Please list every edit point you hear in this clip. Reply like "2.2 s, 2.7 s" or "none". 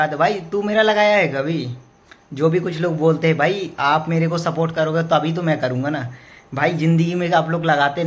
none